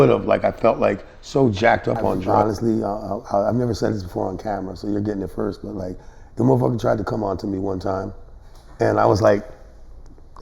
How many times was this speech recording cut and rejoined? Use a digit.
1